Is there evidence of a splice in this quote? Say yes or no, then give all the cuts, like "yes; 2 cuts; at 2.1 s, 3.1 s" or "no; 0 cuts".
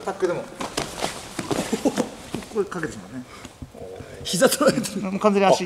no; 0 cuts